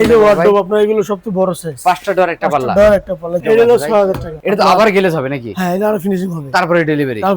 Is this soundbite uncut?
no; 2 cuts; at 3.4 s, 4.3 s

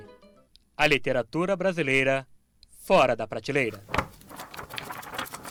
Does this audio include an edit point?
no; 0 cuts

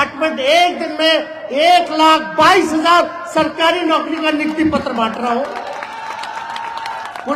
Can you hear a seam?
no; 0 cuts

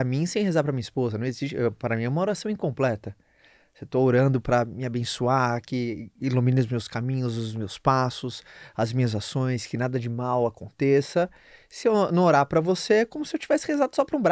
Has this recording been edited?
no; 0 cuts

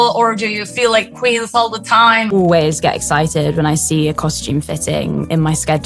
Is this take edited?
yes; 1 cut; at 2.3 s

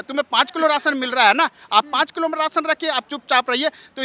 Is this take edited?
no; 0 cuts

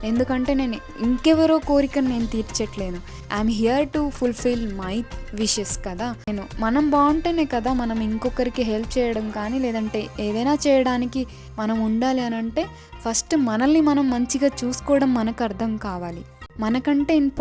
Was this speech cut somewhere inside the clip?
yes; 2 cuts; at 6.3 s, 16.5 s

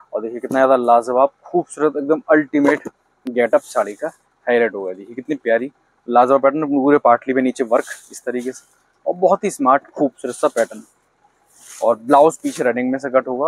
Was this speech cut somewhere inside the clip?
no; 0 cuts

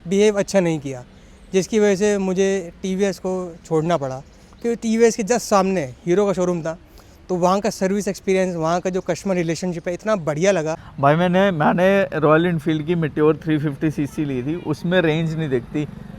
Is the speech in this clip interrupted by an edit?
yes; 1 cut; at 10.8 s

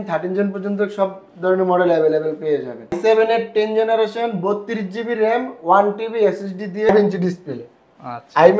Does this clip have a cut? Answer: yes; 2 cuts; at 3.0 s, 6.9 s

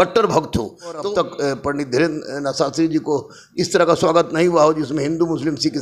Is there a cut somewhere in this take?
yes; 1 cut; at 1.0 s

